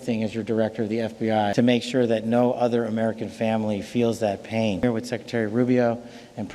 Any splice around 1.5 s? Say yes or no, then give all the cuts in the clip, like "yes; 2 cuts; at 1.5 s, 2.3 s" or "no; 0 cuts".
yes; 2 cuts; at 1.5 s, 4.8 s